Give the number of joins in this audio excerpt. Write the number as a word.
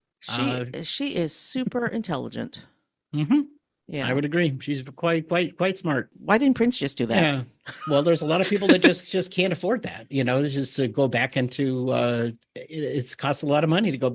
one